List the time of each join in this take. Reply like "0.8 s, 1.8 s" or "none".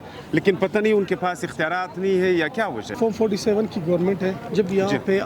3.0 s, 4.4 s